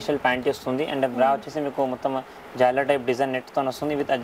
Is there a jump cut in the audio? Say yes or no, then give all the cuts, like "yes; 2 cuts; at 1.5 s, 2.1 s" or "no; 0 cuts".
no; 0 cuts